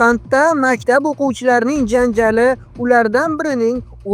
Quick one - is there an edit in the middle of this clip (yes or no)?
no